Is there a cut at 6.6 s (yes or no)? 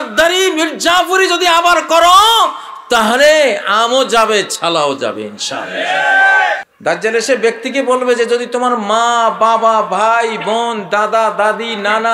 yes